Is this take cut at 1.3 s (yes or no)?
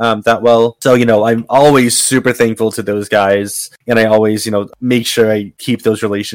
no